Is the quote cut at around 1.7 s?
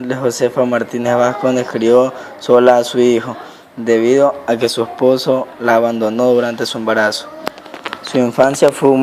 yes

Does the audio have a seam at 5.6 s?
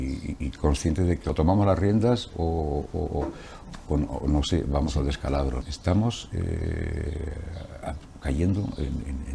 yes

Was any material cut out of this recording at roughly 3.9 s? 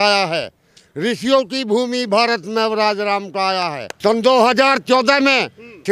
yes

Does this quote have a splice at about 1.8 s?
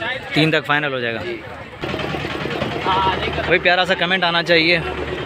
yes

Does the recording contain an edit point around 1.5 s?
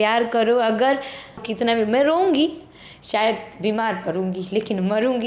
yes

